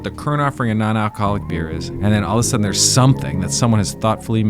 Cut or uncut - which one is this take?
cut